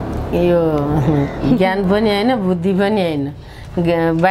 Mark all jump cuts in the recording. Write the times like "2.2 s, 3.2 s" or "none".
none